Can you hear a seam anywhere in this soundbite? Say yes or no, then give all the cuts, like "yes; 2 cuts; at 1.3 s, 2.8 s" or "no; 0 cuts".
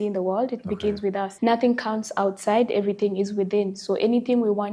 yes; 1 cut; at 1.3 s